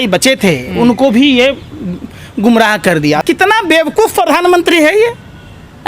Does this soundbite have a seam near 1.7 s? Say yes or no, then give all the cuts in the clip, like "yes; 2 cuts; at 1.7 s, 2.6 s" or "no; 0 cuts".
no; 1 cut; at 3.2 s